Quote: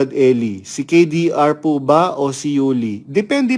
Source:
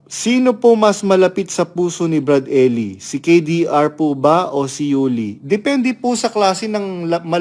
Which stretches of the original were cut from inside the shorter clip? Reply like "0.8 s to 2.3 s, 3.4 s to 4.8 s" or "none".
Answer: none